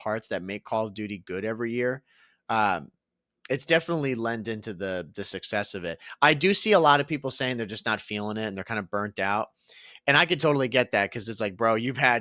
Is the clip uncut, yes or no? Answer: yes